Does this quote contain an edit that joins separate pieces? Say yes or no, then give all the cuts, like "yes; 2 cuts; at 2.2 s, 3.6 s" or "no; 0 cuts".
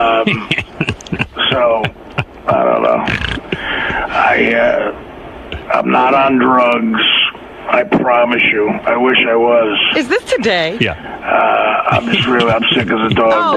no; 0 cuts